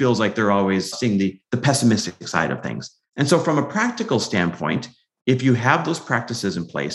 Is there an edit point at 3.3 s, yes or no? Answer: no